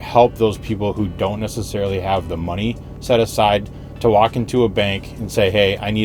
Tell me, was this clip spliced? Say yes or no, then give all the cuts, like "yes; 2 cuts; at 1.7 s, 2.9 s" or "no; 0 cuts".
no; 0 cuts